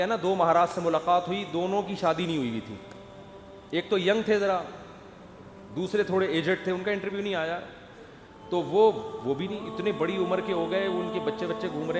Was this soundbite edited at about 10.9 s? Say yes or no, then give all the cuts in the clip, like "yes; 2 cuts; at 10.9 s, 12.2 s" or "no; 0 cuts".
no; 0 cuts